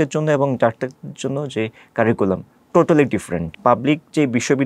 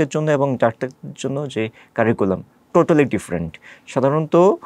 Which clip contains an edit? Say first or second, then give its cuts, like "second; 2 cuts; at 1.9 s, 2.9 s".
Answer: first; 1 cut; at 3.4 s